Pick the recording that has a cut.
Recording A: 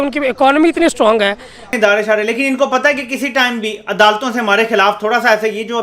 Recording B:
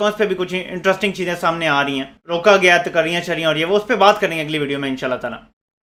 A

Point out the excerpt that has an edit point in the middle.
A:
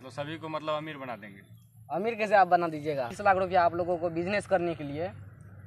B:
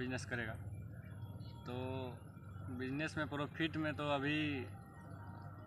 A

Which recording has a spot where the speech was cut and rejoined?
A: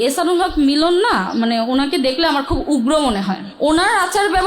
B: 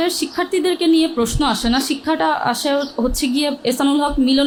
A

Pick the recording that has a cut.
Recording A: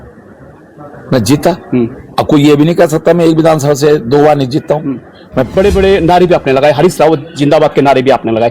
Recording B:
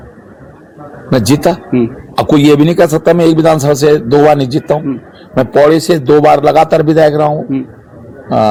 A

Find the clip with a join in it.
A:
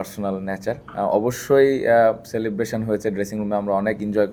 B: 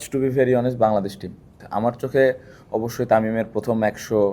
B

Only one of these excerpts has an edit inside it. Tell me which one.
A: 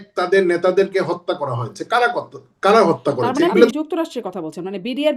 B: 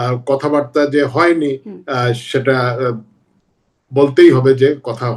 A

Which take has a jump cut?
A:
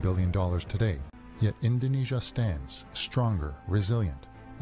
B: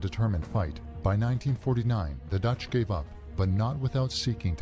A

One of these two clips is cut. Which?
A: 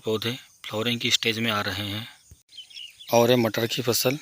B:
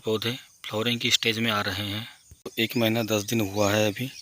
B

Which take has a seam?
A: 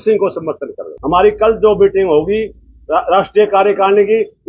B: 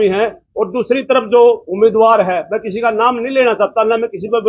A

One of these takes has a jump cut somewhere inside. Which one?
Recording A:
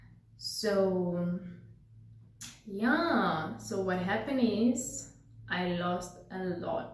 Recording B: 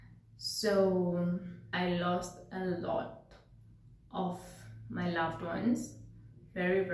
B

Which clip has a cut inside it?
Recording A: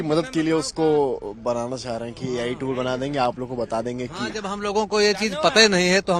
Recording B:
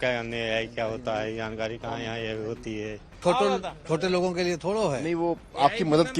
B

